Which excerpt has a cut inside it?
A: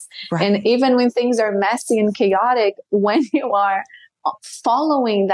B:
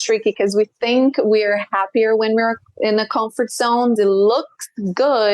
B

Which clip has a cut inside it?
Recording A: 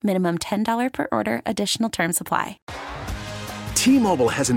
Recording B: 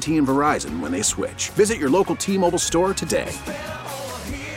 A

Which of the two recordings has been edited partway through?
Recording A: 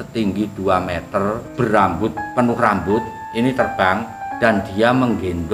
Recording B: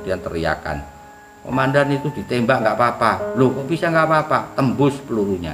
A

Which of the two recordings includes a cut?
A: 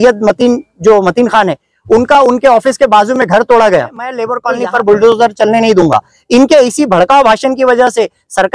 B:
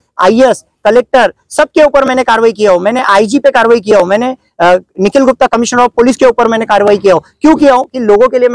A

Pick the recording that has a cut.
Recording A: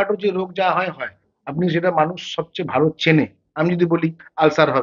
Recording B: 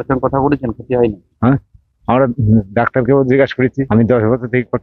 B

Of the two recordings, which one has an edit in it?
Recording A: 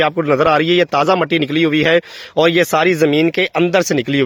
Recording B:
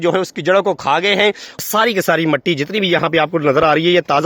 B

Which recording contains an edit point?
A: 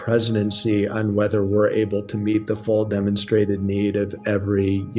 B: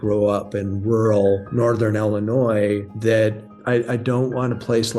B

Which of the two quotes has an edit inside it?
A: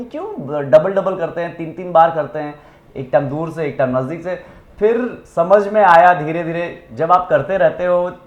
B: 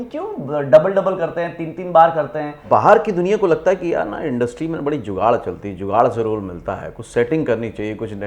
B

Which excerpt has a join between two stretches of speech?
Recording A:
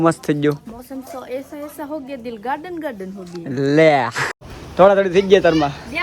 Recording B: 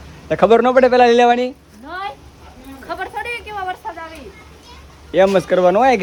A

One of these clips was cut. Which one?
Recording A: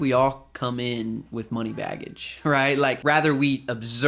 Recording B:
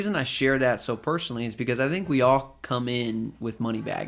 A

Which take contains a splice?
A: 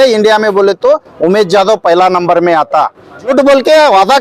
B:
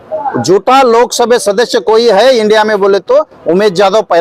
A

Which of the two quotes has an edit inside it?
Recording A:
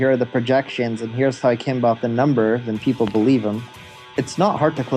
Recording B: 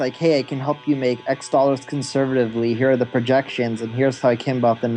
A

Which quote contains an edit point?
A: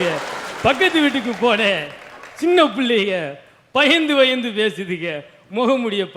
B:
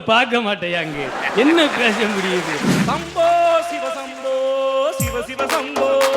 B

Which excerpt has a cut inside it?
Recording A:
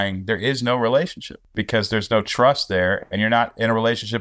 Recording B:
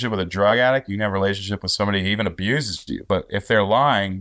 A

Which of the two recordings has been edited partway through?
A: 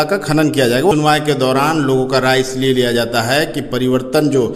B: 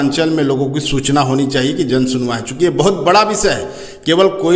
A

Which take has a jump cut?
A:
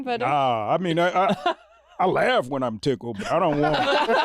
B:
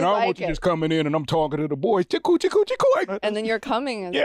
B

